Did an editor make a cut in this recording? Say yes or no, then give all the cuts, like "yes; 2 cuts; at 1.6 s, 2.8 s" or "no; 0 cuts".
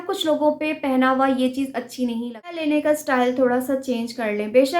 yes; 1 cut; at 2.6 s